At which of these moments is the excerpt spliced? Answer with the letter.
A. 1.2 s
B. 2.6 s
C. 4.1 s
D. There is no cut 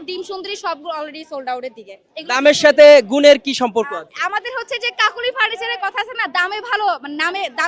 D